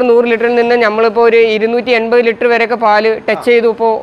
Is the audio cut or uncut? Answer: uncut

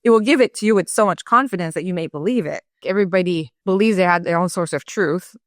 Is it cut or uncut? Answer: cut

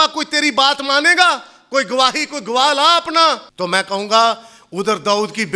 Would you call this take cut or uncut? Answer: cut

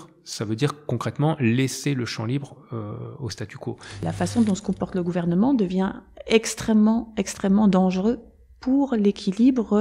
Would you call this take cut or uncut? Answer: cut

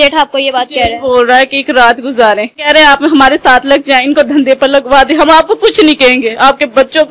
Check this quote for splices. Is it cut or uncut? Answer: cut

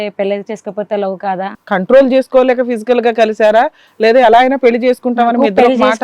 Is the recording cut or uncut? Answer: cut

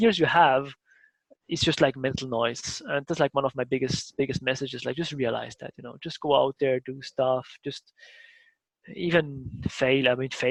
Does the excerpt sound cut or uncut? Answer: uncut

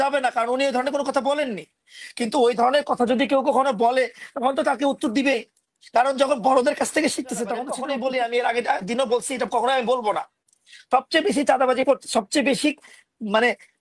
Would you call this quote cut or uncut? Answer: cut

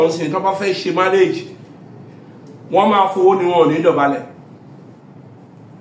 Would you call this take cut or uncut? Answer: uncut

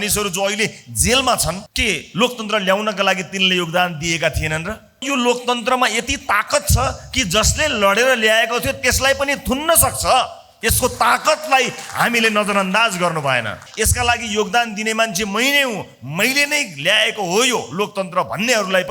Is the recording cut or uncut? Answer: cut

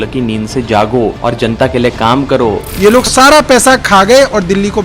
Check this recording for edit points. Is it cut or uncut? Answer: cut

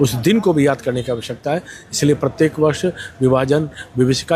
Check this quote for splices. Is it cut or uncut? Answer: uncut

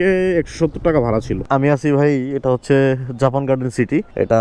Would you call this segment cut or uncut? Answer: cut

